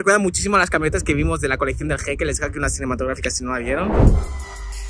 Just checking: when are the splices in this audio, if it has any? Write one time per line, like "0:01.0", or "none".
none